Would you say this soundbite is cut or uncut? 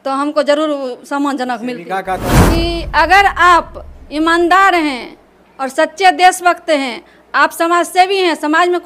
cut